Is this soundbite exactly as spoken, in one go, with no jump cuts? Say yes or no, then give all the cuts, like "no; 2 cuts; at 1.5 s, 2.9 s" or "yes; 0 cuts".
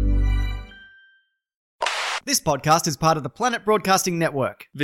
no; 1 cut; at 1.9 s